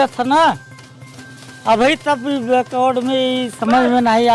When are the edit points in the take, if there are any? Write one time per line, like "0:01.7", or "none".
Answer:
none